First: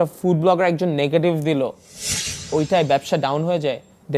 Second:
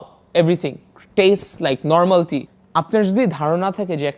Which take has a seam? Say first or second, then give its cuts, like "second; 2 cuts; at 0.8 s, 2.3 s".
second; 1 cut; at 2.6 s